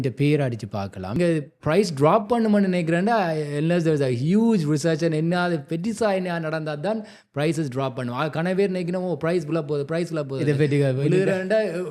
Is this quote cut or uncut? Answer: cut